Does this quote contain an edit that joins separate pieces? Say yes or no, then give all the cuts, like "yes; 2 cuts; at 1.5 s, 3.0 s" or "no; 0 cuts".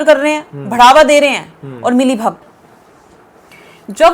yes; 1 cut; at 2.4 s